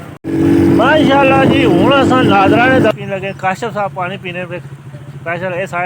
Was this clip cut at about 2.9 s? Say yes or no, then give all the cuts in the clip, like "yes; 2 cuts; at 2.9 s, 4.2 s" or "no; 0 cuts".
yes; 1 cut; at 2.9 s